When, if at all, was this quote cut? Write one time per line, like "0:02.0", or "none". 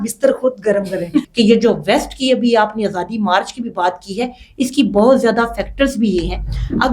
0:01.3